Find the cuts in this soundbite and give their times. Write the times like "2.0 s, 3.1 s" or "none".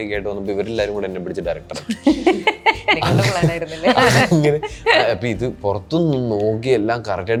none